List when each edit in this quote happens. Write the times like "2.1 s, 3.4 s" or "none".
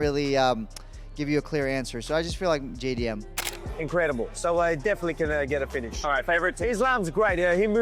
3.4 s